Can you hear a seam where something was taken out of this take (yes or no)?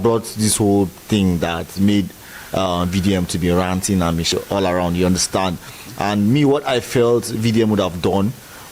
yes